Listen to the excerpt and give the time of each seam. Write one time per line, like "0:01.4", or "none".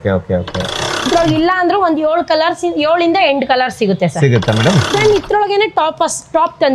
0:00.9
0:04.8